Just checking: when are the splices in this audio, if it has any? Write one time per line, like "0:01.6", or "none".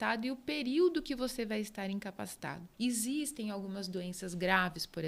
0:02.7